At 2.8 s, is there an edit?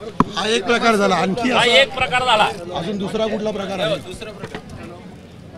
no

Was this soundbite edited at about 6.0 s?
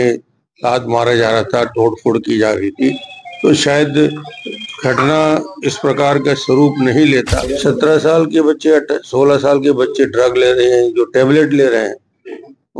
no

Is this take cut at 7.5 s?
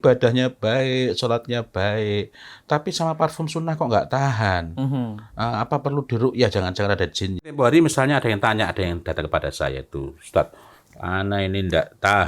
yes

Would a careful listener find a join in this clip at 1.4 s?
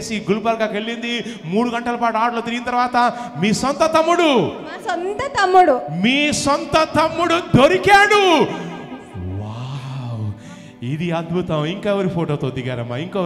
no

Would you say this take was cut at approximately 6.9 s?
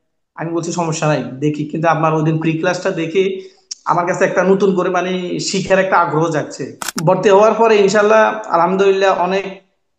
yes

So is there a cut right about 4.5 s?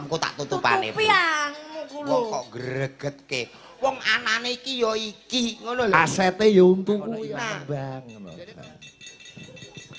no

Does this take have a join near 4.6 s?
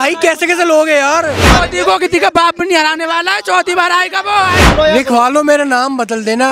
yes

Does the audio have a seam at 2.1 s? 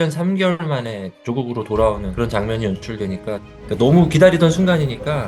yes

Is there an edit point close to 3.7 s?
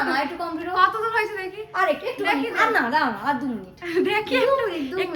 no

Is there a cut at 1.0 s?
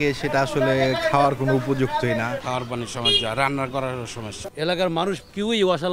no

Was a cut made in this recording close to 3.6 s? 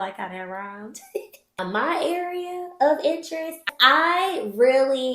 no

